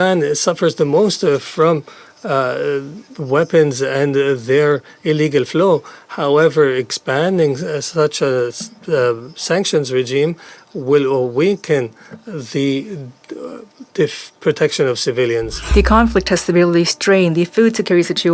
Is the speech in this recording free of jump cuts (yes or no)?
no